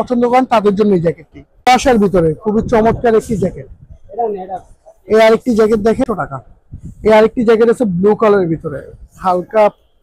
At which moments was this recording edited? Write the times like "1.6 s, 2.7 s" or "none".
1.7 s, 6.0 s